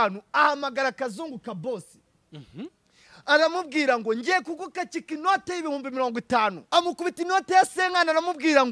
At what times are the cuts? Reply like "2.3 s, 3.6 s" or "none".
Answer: 6.6 s